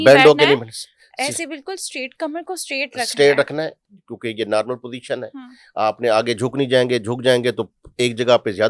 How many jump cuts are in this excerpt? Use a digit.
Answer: 0